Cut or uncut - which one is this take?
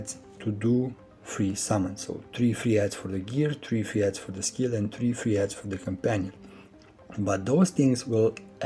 uncut